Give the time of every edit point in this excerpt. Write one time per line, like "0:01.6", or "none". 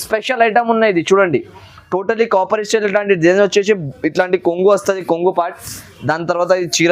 none